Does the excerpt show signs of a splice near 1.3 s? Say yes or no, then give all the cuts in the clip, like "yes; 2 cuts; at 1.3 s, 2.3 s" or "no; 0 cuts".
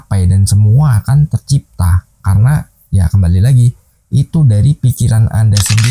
no; 0 cuts